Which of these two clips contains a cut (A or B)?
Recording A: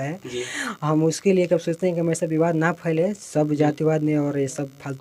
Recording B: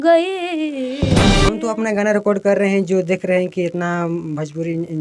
B